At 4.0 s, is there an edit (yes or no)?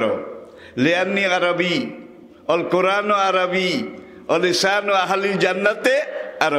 no